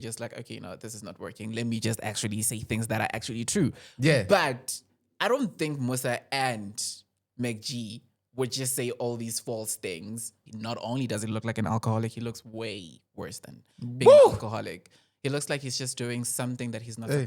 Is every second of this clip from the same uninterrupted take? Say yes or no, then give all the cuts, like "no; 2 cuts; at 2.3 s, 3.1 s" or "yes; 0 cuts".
no; 1 cut; at 10.4 s